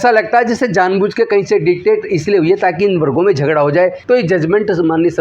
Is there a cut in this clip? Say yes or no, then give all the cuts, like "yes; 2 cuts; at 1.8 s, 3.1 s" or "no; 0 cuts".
yes; 1 cut; at 4.0 s